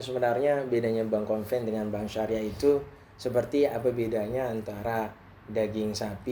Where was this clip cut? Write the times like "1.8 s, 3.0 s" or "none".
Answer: none